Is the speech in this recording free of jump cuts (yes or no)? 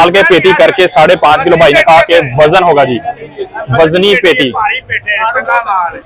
yes